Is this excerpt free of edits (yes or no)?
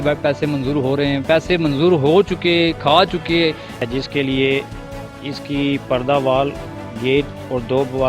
no